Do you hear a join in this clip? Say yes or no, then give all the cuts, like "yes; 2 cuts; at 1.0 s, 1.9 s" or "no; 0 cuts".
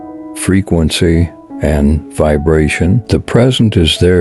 yes; 1 cut; at 3.0 s